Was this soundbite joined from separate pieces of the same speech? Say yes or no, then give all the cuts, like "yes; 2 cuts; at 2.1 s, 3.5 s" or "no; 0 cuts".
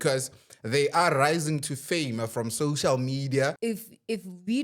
yes; 1 cut; at 3.6 s